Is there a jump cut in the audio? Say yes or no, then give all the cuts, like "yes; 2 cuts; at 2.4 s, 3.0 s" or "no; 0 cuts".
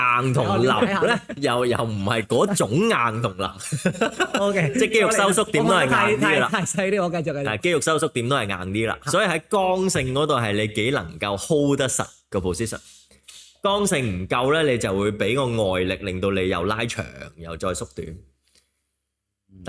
no; 0 cuts